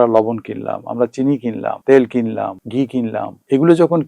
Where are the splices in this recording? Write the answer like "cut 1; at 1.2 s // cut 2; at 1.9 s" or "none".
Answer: cut 1; at 1.8 s // cut 2; at 2.9 s